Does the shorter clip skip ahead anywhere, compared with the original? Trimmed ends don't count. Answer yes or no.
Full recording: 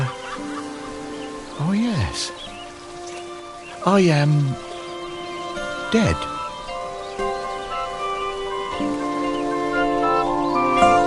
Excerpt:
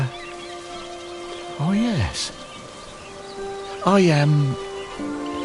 yes